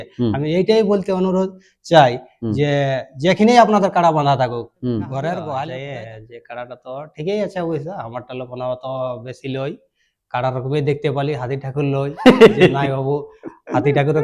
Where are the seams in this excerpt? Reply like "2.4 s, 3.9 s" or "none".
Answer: 5.8 s